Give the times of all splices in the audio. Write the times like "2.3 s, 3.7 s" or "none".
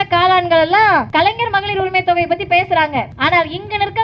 1.1 s, 3.1 s